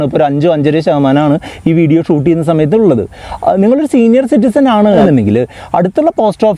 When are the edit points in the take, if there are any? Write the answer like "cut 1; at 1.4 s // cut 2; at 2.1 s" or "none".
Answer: cut 1; at 5.0 s